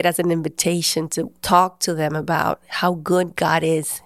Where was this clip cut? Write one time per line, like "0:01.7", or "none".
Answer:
0:01.4